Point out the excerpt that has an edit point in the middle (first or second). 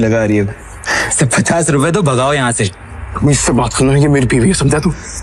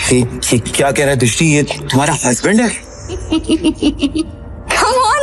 second